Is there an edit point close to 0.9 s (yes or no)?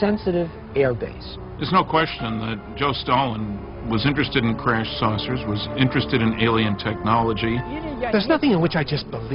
yes